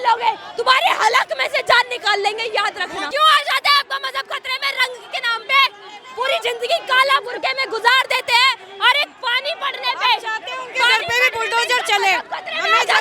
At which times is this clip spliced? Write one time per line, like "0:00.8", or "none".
0:03.0